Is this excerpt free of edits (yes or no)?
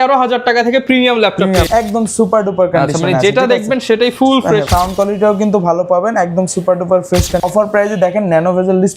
no